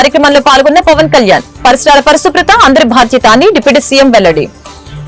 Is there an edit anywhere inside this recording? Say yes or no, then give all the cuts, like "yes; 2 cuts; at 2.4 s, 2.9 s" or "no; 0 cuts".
no; 0 cuts